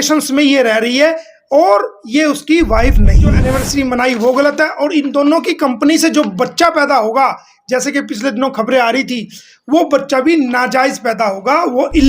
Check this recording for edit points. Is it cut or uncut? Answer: cut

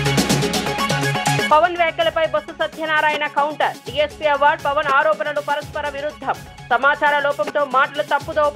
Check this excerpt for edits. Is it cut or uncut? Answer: cut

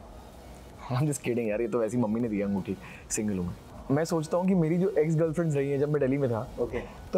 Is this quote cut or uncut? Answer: cut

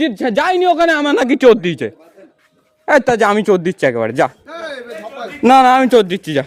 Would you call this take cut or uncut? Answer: uncut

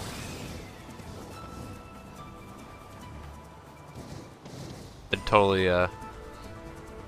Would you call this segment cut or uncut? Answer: uncut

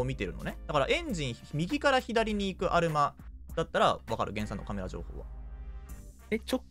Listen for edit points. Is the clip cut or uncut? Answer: uncut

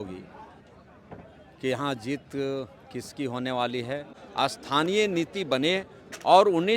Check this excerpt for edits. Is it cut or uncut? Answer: cut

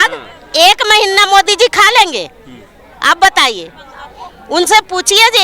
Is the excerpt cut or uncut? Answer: uncut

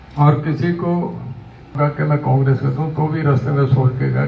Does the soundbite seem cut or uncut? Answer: cut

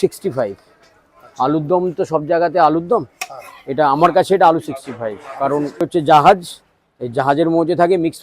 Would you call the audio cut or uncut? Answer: cut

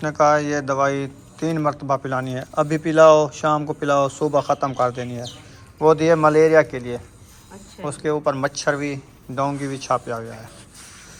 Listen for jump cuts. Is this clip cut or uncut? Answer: uncut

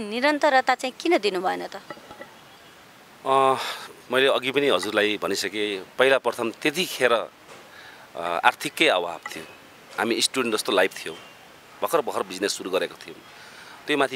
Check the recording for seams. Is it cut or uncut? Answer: uncut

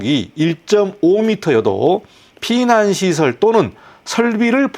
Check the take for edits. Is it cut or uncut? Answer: uncut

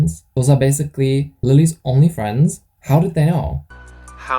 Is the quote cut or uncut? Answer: cut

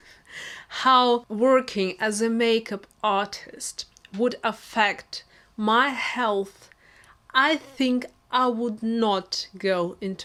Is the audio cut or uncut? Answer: uncut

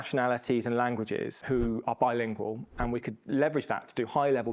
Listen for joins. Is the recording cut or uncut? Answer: cut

